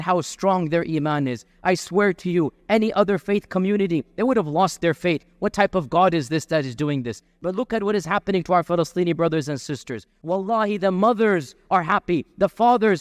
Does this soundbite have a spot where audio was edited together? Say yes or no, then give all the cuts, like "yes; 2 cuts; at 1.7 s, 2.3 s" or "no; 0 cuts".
no; 0 cuts